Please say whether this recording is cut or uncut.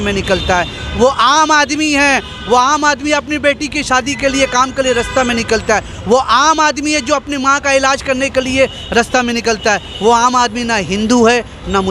uncut